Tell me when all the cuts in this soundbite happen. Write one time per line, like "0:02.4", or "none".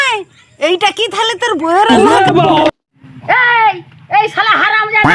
0:02.7